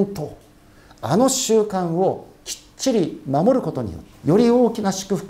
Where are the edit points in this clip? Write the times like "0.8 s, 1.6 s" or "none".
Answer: 4.0 s